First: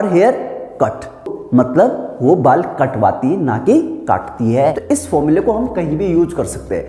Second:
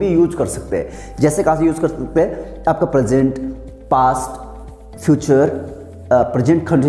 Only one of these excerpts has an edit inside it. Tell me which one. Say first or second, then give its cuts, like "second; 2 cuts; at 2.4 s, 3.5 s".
first; 1 cut; at 4.8 s